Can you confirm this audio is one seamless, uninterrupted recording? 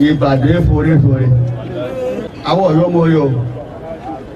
no; 1 cut; at 2.3 s

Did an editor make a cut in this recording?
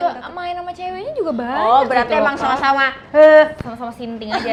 no; 0 cuts

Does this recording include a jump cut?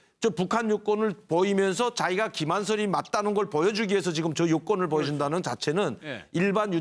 no; 0 cuts

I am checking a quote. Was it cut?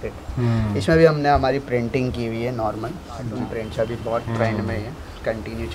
yes; 1 cut; at 3.3 s

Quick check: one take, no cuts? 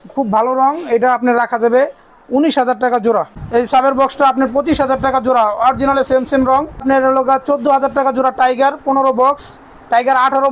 no; 2 cuts; at 3.5 s, 6.8 s

